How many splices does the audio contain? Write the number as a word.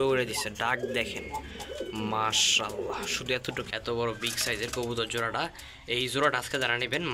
one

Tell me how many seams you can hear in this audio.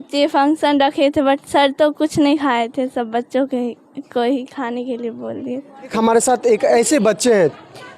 one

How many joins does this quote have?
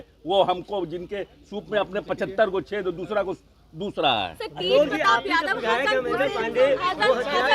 zero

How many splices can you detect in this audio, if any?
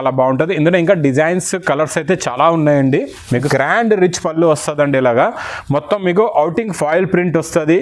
one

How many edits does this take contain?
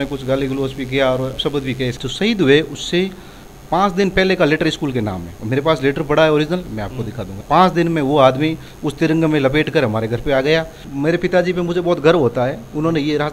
three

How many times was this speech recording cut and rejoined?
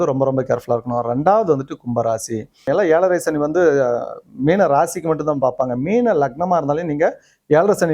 one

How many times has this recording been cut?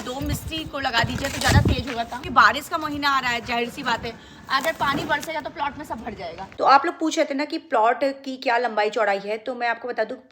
two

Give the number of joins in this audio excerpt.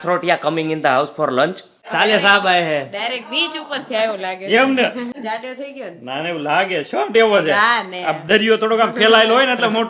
two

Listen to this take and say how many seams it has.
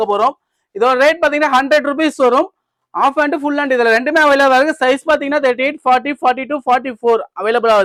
zero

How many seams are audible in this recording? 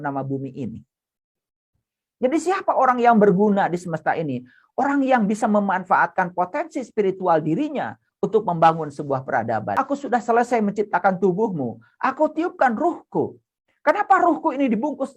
one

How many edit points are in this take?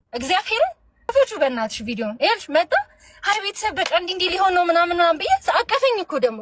one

